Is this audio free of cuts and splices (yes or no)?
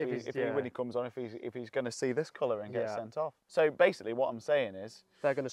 no